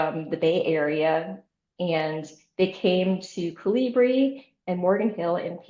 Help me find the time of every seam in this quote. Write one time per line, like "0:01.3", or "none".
none